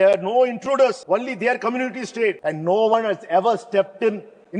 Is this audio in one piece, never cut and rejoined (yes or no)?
no